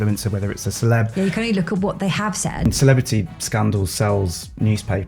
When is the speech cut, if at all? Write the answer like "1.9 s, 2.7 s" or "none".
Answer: 2.7 s